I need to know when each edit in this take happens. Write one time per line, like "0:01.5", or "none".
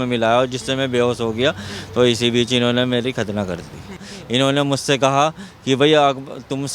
0:04.1